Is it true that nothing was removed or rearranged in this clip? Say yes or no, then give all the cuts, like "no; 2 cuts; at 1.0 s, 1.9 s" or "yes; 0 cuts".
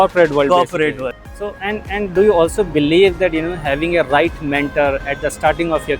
no; 1 cut; at 1.1 s